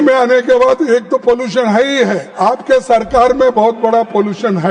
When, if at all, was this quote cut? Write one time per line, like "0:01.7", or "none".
0:02.3

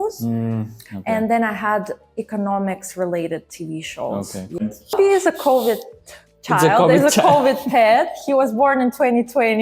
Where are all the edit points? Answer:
0:04.9

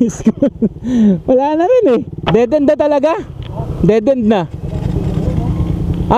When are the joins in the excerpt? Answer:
0:02.2

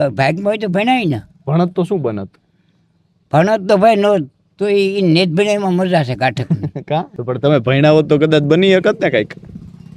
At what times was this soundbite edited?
none

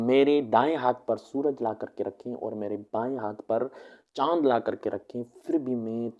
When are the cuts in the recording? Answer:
none

